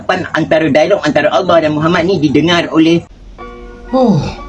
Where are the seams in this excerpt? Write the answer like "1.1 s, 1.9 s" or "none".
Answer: 3.2 s